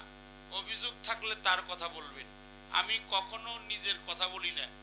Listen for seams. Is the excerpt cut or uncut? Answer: uncut